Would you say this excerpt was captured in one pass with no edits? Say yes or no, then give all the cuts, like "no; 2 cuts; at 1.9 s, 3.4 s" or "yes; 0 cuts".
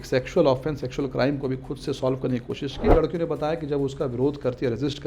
no; 1 cut; at 2.9 s